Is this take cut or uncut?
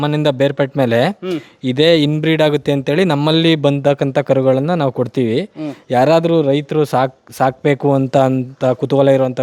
uncut